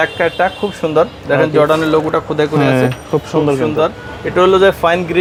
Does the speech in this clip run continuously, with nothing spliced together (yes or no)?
yes